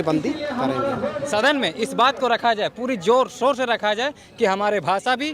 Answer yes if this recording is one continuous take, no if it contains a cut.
no